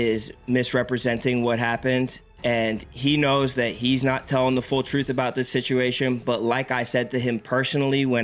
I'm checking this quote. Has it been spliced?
no; 0 cuts

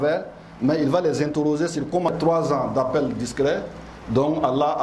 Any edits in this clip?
yes; 1 cut; at 2.1 s

